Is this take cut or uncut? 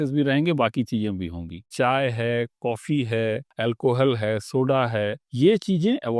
cut